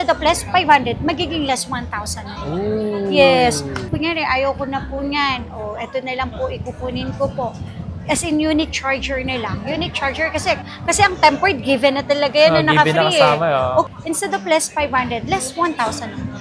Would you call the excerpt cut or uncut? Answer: uncut